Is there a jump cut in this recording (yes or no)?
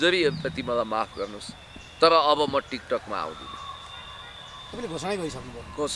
no